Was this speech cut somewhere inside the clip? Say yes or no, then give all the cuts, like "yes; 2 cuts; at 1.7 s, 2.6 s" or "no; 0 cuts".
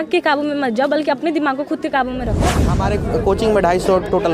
yes; 1 cut; at 2.7 s